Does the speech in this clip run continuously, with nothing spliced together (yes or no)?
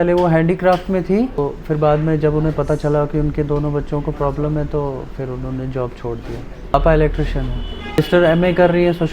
yes